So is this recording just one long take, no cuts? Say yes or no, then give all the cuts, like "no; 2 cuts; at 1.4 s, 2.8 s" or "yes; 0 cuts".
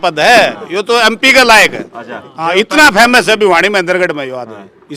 yes; 0 cuts